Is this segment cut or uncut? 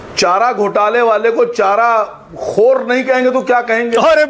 uncut